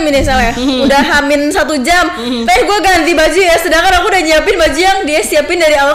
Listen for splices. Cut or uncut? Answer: uncut